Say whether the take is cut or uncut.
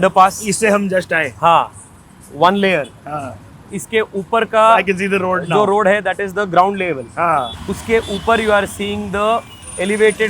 cut